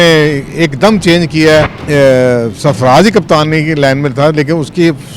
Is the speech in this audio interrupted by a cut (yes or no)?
yes